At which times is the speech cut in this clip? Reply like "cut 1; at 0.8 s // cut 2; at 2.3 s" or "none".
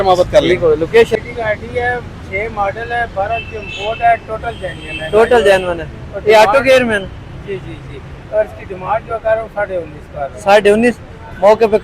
cut 1; at 1.2 s